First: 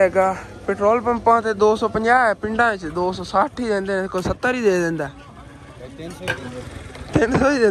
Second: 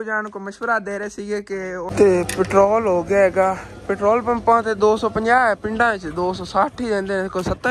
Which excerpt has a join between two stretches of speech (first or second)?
second